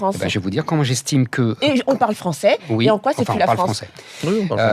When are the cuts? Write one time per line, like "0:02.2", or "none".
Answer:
0:01.7